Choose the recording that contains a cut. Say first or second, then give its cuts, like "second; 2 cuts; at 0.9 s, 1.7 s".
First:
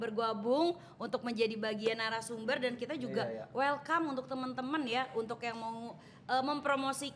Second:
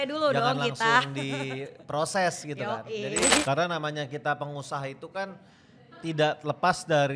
second; 1 cut; at 3.4 s